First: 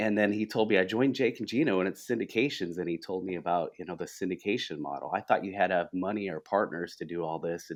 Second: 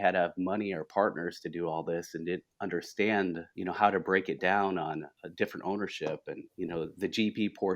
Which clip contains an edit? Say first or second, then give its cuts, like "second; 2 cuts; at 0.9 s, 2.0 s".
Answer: second; 3 cuts; at 3.5 s, 5.2 s, 6.5 s